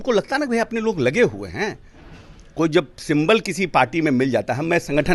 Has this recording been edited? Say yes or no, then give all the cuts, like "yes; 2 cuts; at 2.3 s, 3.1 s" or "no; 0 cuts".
no; 0 cuts